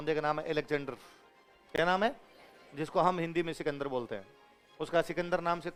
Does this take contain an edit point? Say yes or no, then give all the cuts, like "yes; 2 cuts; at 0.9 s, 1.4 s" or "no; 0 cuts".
no; 0 cuts